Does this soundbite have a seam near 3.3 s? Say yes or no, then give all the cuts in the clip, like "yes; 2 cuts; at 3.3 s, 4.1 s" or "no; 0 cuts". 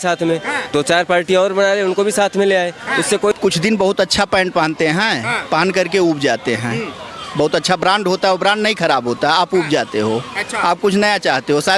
yes; 1 cut; at 3.3 s